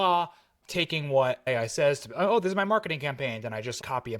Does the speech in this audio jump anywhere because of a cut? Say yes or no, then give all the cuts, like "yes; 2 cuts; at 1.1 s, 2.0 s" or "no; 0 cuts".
yes; 1 cut; at 1.5 s